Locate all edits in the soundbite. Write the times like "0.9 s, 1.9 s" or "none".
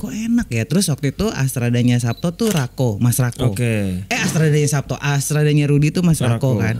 none